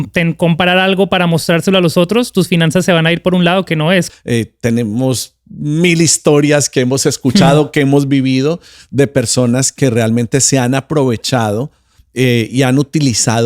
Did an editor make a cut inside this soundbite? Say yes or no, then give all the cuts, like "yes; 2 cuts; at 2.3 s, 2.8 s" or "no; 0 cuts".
yes; 1 cut; at 4.1 s